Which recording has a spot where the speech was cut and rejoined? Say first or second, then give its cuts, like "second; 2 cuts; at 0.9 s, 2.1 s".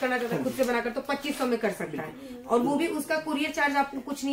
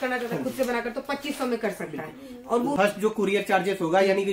second; 1 cut; at 2.8 s